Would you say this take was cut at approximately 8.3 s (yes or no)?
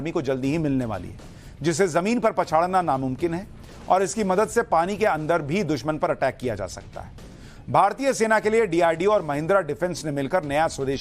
yes